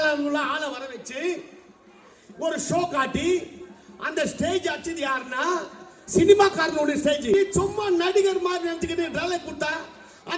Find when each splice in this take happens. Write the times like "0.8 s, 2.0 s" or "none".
7.3 s